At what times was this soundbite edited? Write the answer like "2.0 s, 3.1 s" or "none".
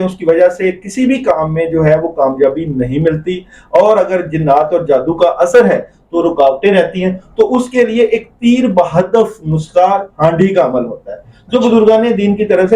none